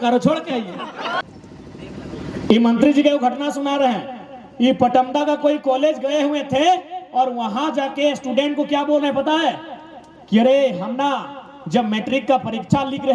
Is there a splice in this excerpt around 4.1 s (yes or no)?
no